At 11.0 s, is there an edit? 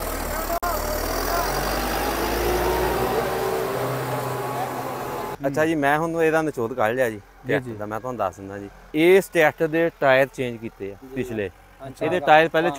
yes; 3 cuts; at 5.3 s, 8.7 s, 11.0 s

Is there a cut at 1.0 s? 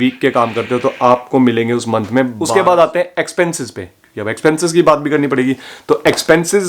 no; 1 cut; at 2.4 s

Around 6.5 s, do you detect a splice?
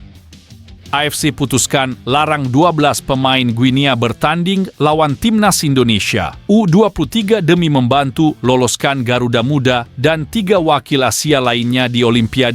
no; 1 cut; at 0.9 s

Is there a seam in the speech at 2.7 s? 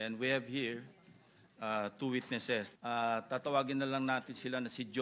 yes; 1 cut; at 2.7 s

